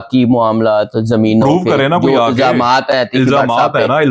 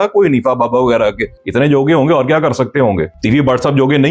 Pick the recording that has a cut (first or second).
second